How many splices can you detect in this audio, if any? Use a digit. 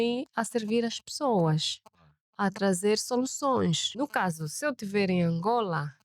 1